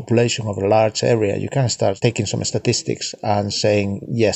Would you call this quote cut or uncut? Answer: cut